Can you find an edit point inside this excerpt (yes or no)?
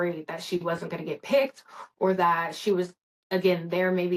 no